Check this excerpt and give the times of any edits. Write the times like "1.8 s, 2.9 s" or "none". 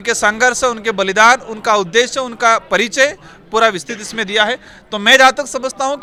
none

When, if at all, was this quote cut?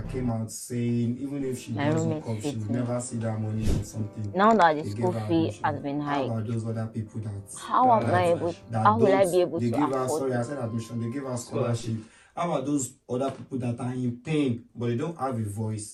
none

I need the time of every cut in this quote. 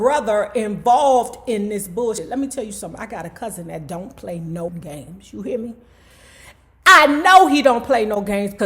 2.2 s

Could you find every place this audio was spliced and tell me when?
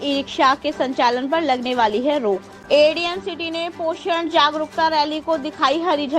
2.5 s

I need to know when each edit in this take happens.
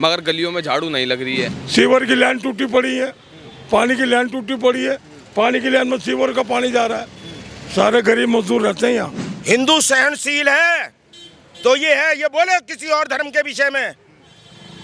1.6 s, 9.2 s

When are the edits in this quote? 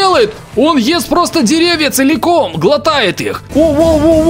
3.3 s

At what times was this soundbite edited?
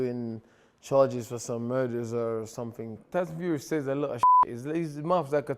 3.0 s

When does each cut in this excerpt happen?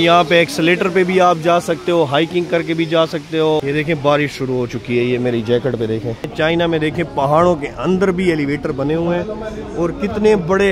3.6 s, 6.3 s

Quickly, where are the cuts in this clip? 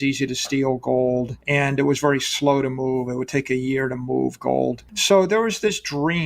1.4 s, 4.9 s

